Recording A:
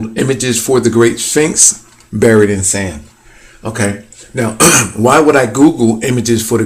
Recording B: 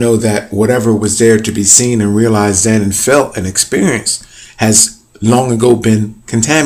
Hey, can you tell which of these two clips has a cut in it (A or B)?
A